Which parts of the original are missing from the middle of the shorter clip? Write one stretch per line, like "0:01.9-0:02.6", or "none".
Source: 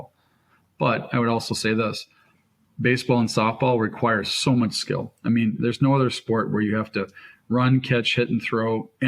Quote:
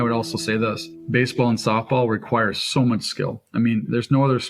0:02.1-0:02.6